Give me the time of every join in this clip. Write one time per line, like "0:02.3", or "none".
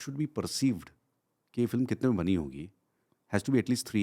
none